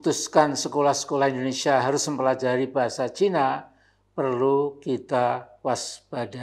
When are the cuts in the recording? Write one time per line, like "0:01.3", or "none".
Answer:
none